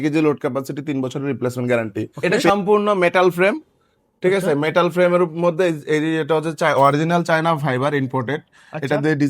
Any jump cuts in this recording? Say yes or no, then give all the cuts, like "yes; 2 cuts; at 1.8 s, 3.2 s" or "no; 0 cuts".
yes; 1 cut; at 2.3 s